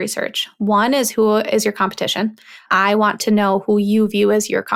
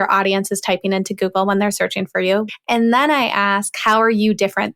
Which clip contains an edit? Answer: second; 1 cut; at 2.5 s

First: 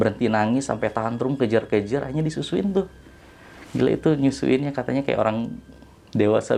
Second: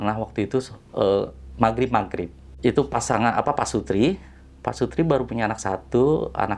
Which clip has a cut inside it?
second; 1 cut; at 2.4 s

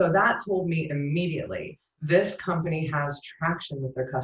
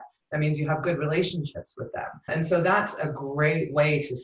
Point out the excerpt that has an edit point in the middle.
second; 1 cut; at 2.3 s

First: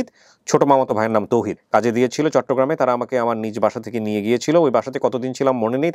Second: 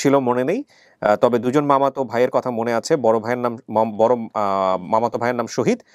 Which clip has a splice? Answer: first; 1 cut; at 1.6 s

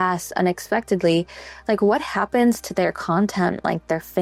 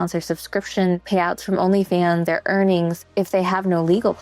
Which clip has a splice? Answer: second; 3 cuts; at 1.0 s, 2.2 s, 3.1 s

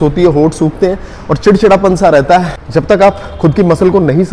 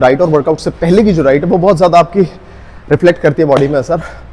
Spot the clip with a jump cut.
first; 1 cut; at 2.6 s

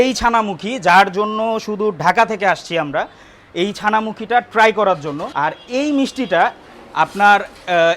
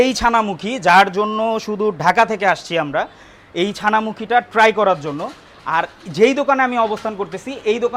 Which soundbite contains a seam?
first; 1 cut; at 5.2 s

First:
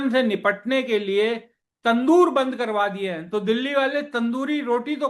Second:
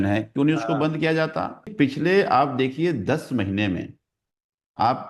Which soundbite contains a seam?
second; 1 cut; at 1.7 s

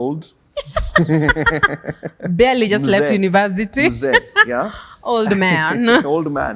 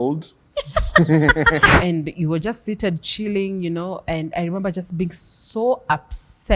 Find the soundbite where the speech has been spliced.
second; 1 cut; at 1.8 s

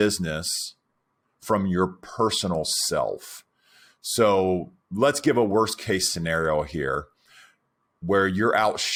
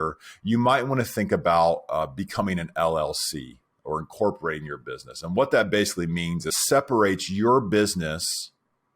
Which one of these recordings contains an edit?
second; 1 cut; at 6.5 s

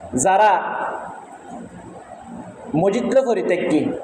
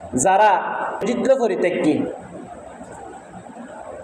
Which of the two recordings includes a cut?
second; 1 cut; at 1.1 s

